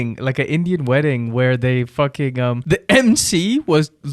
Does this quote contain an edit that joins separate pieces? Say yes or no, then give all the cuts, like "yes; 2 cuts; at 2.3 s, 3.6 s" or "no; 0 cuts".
yes; 1 cut; at 2.6 s